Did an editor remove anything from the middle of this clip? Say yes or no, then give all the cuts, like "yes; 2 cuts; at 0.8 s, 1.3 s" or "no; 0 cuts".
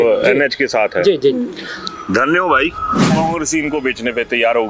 yes; 1 cut; at 3.1 s